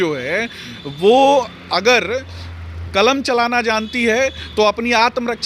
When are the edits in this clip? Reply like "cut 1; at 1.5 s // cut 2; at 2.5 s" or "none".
none